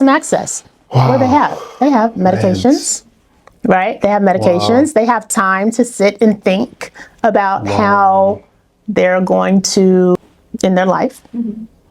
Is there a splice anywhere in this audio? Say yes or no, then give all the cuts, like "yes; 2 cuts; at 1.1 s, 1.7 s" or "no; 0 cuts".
yes; 1 cut; at 10.2 s